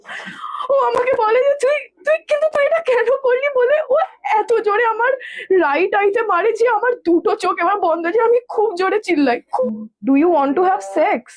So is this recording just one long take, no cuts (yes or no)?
no